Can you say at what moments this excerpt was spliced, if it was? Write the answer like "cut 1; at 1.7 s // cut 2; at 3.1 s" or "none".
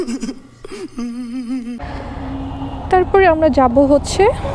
cut 1; at 1.8 s